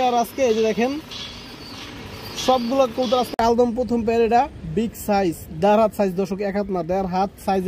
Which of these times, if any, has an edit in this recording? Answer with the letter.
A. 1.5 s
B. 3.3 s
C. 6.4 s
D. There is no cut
B